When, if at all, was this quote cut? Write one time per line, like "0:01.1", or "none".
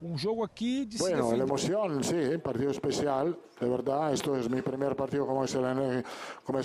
0:00.9